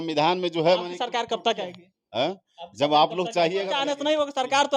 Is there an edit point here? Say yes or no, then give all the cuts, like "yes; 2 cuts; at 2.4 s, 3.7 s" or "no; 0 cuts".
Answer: yes; 1 cut; at 3.7 s